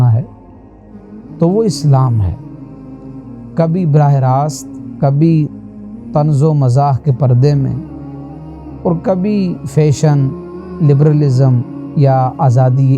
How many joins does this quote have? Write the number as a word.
two